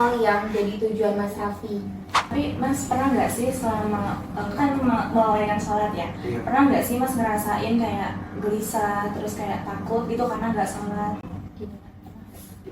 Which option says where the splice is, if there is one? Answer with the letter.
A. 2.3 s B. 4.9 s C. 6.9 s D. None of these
A